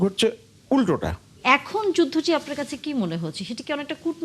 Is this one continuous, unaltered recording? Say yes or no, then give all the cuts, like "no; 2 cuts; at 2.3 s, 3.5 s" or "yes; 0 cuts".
no; 1 cut; at 1.4 s